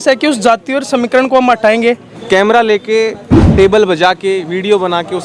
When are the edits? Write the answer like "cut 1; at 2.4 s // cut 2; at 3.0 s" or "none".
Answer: cut 1; at 2.2 s